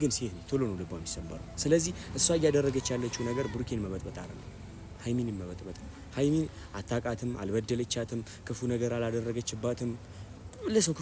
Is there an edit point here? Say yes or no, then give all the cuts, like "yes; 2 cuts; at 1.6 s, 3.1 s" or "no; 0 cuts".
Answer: no; 0 cuts